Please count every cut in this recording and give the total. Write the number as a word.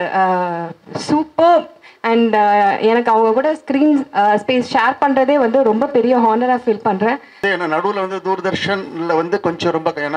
one